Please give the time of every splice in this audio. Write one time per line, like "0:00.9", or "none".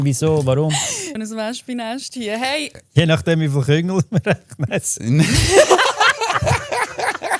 0:01.2
0:02.7